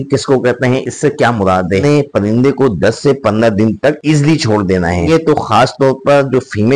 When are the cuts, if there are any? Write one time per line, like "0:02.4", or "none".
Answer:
0:01.8
0:05.1